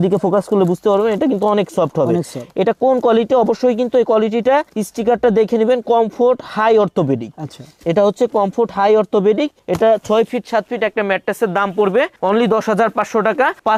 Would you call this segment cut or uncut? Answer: uncut